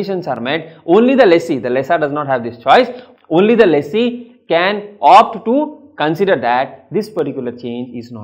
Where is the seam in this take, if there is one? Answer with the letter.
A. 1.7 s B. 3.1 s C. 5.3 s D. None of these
D